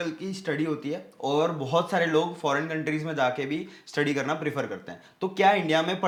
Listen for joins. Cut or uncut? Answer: uncut